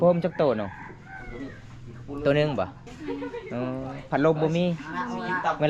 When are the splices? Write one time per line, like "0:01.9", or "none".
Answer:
0:02.9